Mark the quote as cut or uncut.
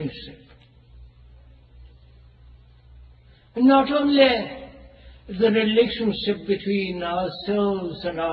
uncut